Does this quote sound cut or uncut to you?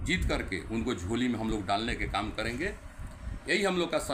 uncut